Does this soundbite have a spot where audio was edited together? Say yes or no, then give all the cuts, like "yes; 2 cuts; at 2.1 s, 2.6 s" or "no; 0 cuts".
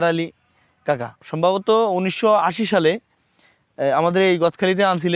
yes; 1 cut; at 1.2 s